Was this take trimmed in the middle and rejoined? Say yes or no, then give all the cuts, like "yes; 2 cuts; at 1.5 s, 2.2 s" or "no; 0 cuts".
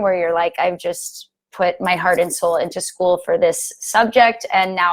no; 0 cuts